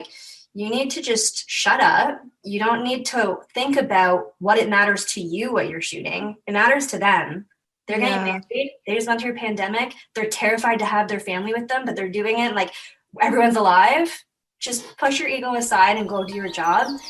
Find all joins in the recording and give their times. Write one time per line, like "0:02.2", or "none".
none

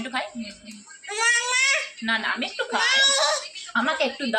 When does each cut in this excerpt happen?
none

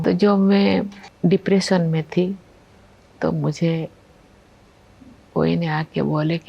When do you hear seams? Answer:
0:01.0

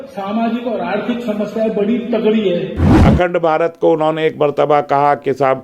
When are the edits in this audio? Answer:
0:02.9

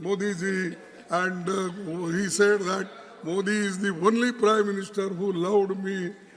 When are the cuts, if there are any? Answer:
none

